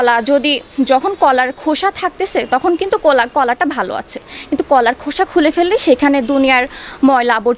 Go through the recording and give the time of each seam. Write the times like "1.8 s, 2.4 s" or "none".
none